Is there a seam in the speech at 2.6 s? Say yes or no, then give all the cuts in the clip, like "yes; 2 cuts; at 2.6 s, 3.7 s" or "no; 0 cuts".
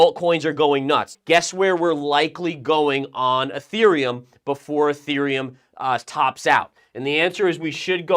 no; 1 cut; at 1.1 s